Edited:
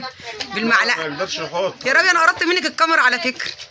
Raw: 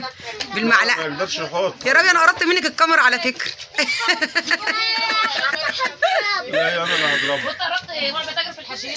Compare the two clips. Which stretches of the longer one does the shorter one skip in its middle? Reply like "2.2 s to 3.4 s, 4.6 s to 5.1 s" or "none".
none